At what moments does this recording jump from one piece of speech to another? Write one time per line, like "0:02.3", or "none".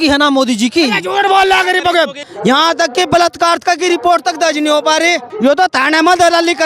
0:02.2
0:05.3